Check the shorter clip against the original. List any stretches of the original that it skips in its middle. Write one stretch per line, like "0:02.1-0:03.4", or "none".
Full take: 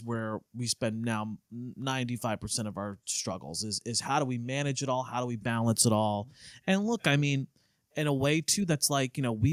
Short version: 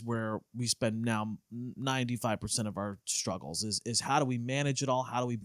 none